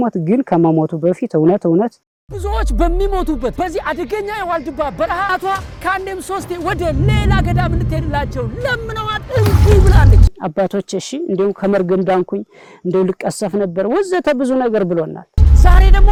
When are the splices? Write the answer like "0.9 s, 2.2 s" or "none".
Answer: none